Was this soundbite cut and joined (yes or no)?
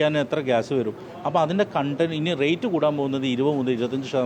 no